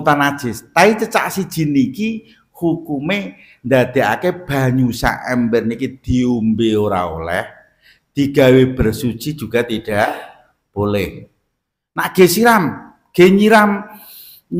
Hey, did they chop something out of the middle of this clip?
no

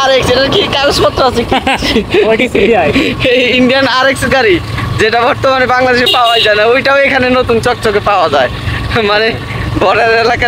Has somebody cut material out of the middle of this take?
no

